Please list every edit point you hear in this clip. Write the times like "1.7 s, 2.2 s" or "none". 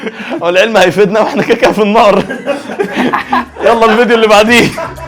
none